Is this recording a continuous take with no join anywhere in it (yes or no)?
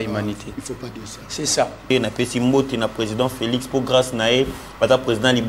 no